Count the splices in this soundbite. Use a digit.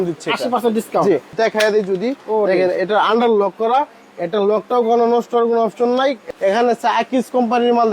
2